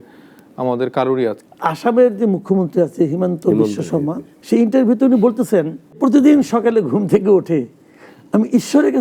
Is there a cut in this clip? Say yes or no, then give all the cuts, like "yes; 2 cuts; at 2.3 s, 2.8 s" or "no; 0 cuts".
yes; 3 cuts; at 1.5 s, 4.3 s, 6.0 s